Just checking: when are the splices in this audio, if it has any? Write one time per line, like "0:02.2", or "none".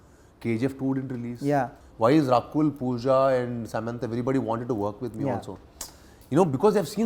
0:01.8